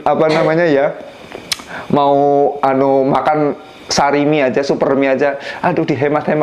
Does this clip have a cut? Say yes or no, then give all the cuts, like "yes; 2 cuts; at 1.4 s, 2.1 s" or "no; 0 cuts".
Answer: no; 0 cuts